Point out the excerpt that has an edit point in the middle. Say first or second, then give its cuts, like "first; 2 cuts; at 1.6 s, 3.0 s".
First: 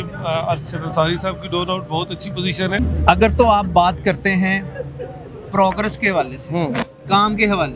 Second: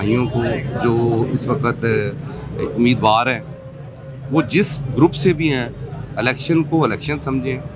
first; 1 cut; at 2.8 s